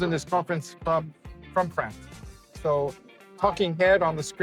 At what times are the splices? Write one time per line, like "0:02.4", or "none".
none